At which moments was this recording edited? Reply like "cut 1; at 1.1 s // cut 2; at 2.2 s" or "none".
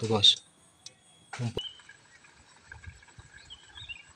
cut 1; at 1.6 s